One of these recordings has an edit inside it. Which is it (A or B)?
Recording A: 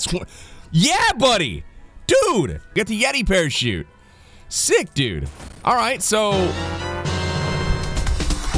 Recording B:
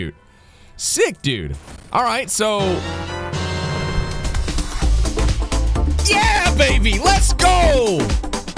A